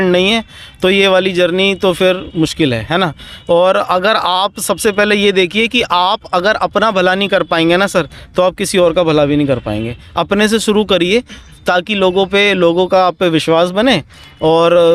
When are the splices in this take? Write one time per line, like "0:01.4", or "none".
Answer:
none